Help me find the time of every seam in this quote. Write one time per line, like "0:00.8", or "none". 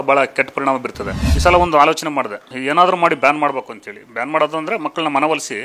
0:01.3
0:02.5

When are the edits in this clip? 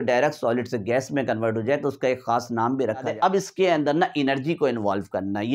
0:03.1

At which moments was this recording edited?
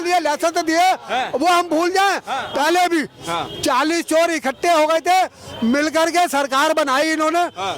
0:02.4

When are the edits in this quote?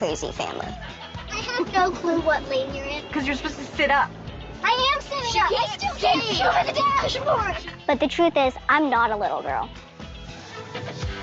0:09.0

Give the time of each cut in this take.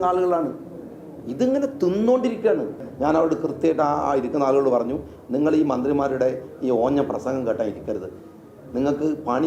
0:02.9

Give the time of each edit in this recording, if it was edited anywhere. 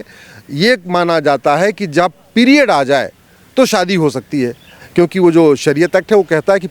0:04.8

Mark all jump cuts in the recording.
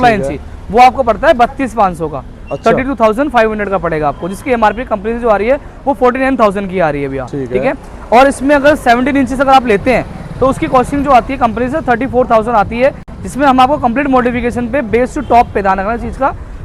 none

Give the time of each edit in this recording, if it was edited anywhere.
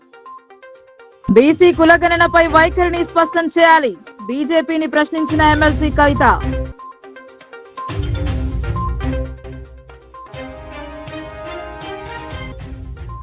0:01.1

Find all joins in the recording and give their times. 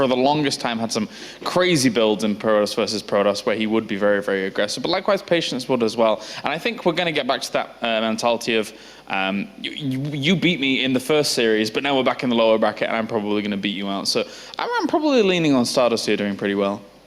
none

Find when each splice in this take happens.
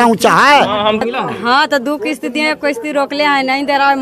0:01.0

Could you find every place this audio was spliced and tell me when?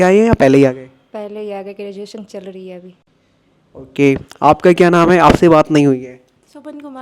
none

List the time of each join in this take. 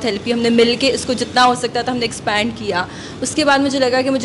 none

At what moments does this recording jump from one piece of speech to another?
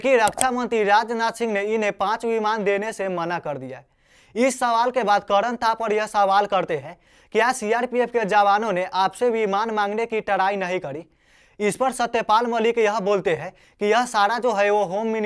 none

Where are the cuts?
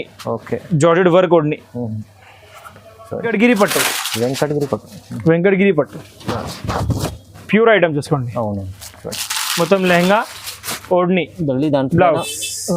0:03.3

